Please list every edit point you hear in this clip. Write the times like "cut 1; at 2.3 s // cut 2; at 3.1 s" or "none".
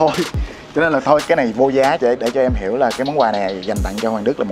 cut 1; at 2.0 s